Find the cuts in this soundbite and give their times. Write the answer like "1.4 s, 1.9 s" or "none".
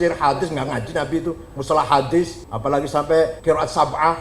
2.4 s, 3.4 s